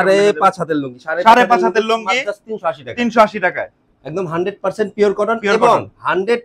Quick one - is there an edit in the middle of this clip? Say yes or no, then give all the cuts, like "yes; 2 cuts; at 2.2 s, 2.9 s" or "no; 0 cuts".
no; 0 cuts